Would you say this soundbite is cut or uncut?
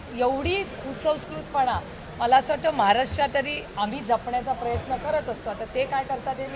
uncut